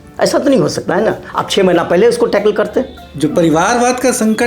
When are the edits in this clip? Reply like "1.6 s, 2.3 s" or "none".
3.0 s